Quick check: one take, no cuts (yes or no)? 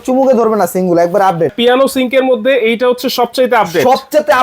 no